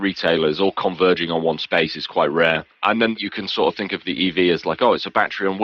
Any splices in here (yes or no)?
no